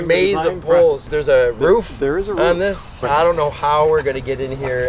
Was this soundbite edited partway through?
yes; 1 cut; at 1.1 s

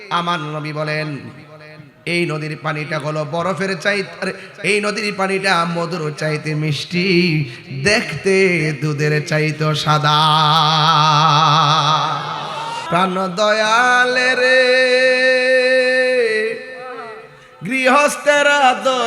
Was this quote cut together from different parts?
yes; 1 cut; at 12.8 s

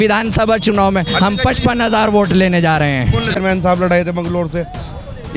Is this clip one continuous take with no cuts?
no; 1 cut; at 3.3 s

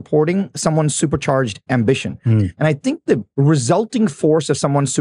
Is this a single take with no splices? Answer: no; 1 cut; at 3.3 s

